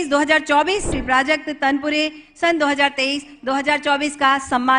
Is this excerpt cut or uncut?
cut